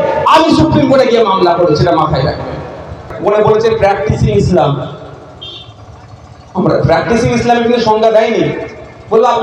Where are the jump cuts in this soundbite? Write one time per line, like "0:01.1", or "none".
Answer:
0:03.1